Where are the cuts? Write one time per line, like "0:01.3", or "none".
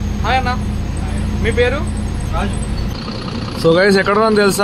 0:02.9